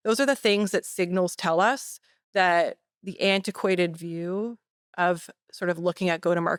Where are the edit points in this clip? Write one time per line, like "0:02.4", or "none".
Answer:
none